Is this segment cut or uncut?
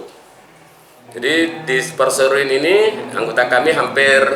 uncut